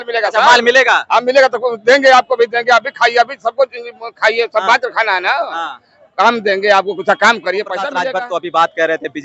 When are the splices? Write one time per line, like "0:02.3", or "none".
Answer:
0:08.0